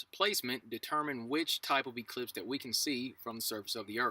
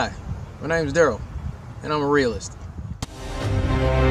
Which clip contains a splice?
first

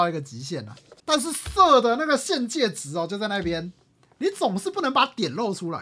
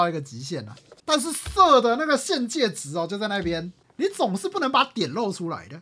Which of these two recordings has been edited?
second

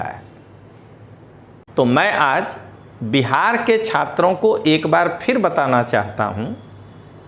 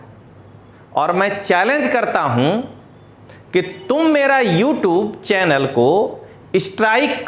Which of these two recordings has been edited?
first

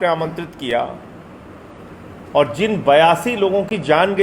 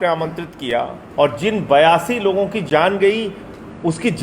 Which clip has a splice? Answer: second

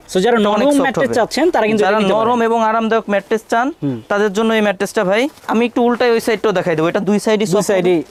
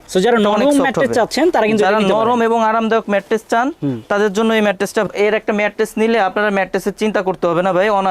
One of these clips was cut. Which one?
second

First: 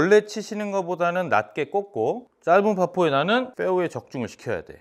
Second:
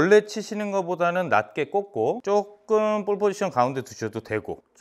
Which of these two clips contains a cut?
first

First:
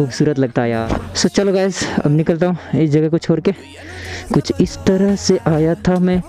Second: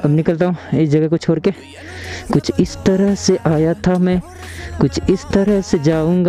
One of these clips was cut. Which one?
first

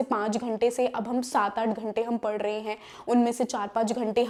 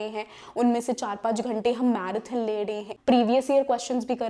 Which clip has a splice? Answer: second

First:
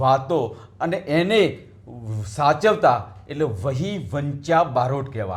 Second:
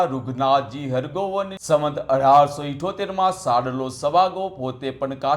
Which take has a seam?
second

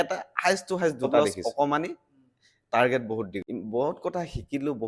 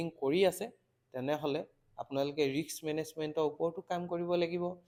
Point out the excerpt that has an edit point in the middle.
first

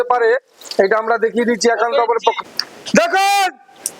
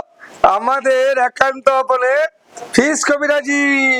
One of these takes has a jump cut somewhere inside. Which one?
first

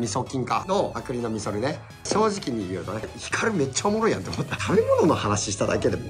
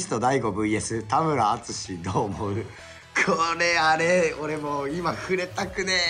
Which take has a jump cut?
first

